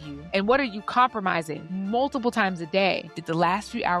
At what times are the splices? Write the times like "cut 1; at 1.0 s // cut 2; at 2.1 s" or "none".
cut 1; at 1.6 s // cut 2; at 3.1 s